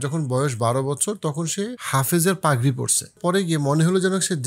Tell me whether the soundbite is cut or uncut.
cut